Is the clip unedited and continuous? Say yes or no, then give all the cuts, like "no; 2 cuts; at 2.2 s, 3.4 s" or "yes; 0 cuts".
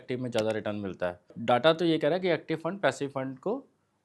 no; 1 cut; at 1.4 s